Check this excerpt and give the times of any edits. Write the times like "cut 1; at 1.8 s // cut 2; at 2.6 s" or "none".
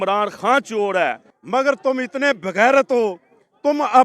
cut 1; at 1.3 s